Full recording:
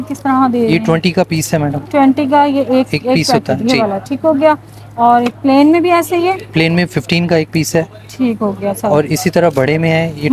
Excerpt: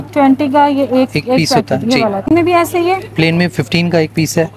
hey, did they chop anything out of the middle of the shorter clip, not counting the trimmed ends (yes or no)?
yes